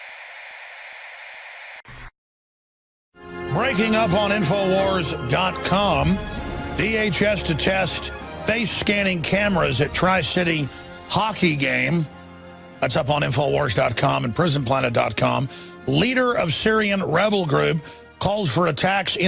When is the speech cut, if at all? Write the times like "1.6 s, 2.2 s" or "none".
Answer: 1.8 s, 11.3 s